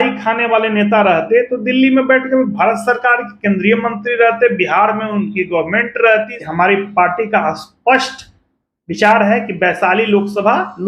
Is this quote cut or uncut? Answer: cut